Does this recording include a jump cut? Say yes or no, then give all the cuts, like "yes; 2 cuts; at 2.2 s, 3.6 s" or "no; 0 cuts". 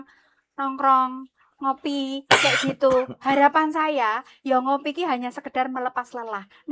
no; 0 cuts